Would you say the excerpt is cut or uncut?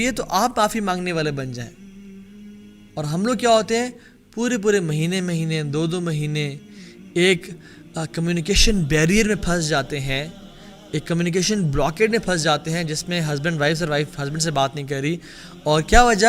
uncut